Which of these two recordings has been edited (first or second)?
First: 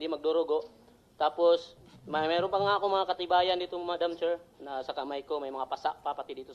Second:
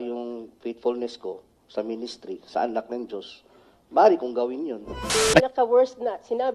second